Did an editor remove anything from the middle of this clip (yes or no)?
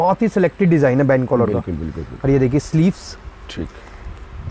no